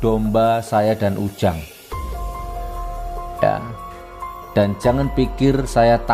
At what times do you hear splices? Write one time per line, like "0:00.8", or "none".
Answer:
0:01.6
0:03.1